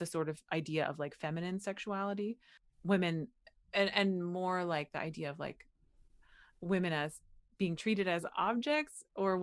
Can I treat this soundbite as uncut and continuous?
yes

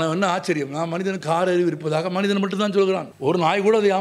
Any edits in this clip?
yes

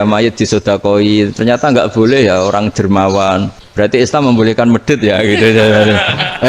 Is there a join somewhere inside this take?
yes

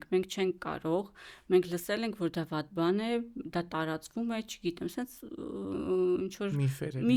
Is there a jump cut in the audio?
no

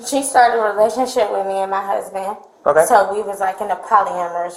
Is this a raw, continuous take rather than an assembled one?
yes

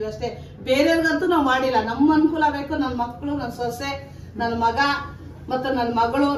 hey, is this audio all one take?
yes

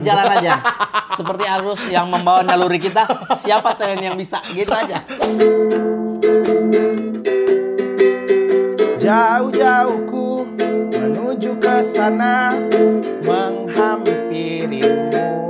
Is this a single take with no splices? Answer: no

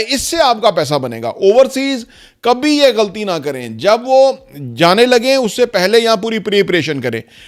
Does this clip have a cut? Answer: no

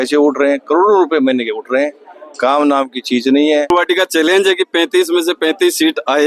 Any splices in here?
yes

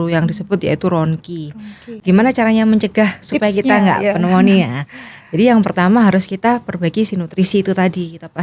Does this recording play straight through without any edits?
no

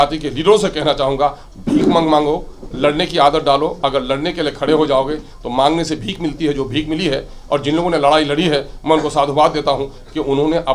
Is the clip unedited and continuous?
yes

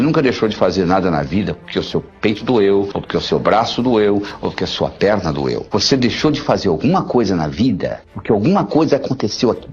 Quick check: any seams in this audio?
yes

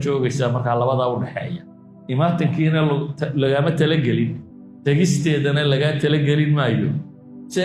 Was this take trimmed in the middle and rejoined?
no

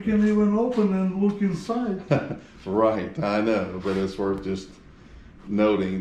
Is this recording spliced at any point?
no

